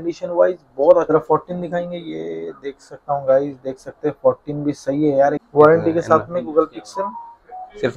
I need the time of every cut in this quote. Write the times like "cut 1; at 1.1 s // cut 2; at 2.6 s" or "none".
cut 1; at 1.1 s // cut 2; at 5.4 s